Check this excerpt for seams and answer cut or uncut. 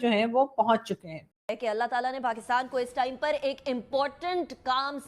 cut